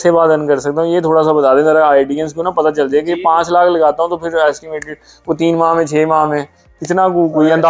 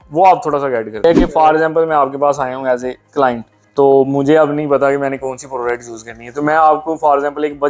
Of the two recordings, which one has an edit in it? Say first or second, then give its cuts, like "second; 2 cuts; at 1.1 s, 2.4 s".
second; 2 cuts; at 1.0 s, 3.5 s